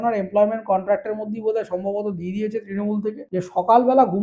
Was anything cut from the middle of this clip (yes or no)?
yes